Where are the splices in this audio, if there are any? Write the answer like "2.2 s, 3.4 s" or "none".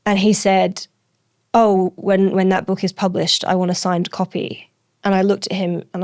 none

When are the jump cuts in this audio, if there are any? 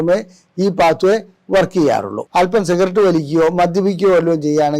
2.2 s

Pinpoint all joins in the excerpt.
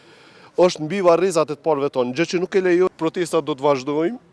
2.9 s

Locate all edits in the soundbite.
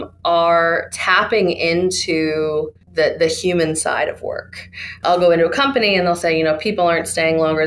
2.8 s, 5.0 s

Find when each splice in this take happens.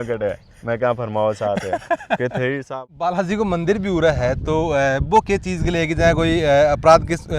2.7 s

